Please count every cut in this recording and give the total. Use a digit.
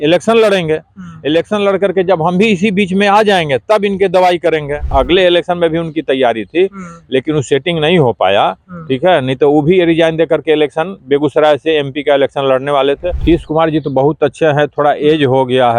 2